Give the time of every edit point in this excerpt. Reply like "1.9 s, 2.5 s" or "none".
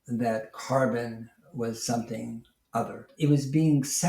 3.1 s

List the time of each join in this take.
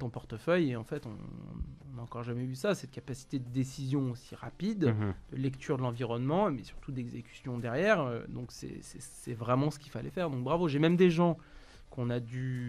none

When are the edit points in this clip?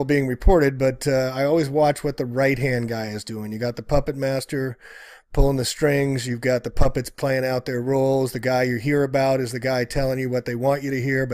none

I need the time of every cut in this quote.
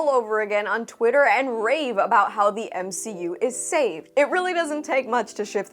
4.0 s

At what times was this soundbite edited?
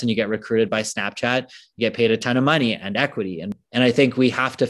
3.6 s

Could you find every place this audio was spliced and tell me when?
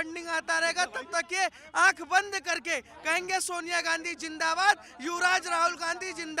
none

